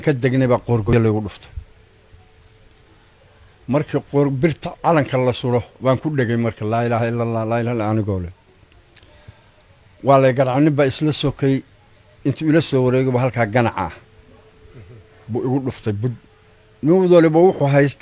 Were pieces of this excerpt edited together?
yes; 1 cut; at 0.9 s

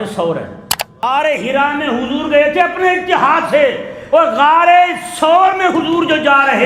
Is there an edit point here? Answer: yes; 1 cut; at 1.0 s

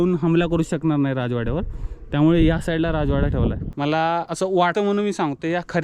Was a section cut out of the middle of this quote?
yes; 2 cuts; at 3.7 s, 4.6 s

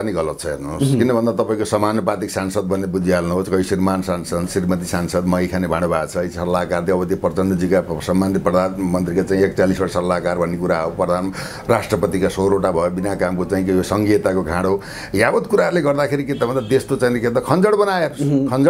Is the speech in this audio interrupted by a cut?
no; 0 cuts

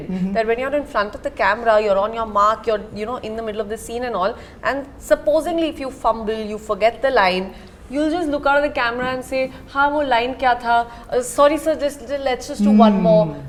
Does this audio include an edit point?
no; 0 cuts

